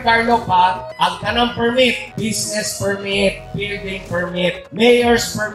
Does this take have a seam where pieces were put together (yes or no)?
no